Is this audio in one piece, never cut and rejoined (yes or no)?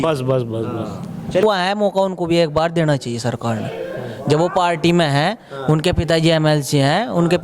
no